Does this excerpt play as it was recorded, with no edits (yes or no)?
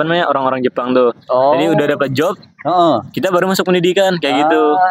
yes